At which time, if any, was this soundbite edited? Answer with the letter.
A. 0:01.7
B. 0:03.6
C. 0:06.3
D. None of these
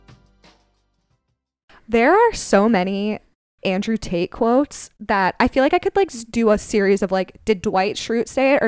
A